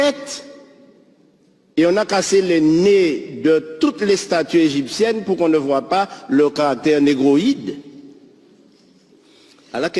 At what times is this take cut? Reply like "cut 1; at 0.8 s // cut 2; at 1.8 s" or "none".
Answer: cut 1; at 9.1 s

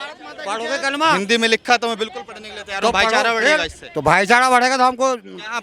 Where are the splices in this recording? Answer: none

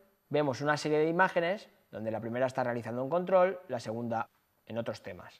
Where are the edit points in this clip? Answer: none

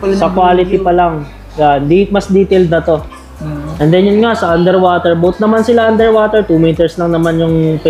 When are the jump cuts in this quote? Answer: none

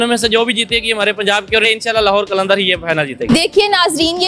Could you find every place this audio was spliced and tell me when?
cut 1; at 1.6 s // cut 2; at 3.2 s

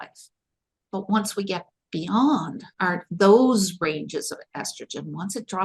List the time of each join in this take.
cut 1; at 2.6 s

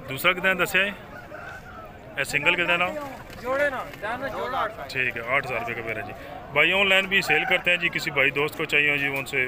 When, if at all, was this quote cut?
none

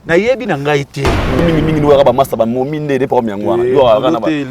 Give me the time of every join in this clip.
cut 1; at 1.4 s

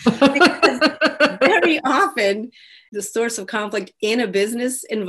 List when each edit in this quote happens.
cut 1; at 2.9 s

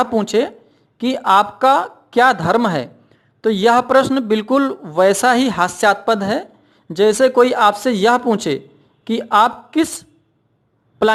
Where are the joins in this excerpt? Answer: none

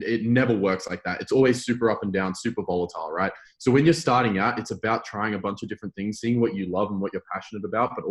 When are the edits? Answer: none

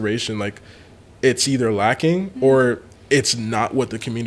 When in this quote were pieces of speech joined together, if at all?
none

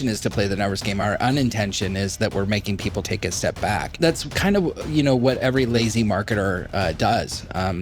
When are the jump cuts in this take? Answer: cut 1; at 1.0 s // cut 2; at 3.1 s // cut 3; at 4.0 s // cut 4; at 5.5 s

